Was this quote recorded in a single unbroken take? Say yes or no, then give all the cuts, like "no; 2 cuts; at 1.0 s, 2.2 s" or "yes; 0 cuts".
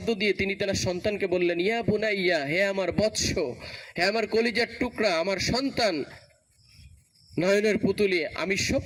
yes; 0 cuts